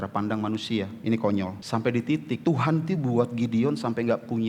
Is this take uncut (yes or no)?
no